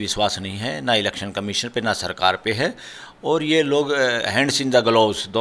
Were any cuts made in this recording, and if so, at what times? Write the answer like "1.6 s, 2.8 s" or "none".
none